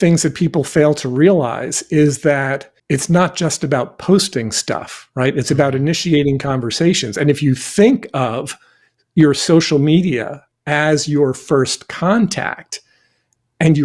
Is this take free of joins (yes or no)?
no